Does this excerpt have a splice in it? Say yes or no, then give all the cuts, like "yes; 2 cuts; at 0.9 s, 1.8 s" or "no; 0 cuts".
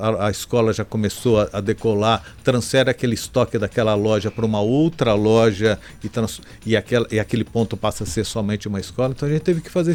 no; 0 cuts